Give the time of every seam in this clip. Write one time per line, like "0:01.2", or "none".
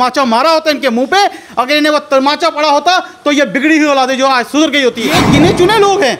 0:05.1